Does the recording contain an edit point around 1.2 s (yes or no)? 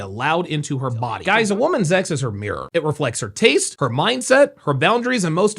yes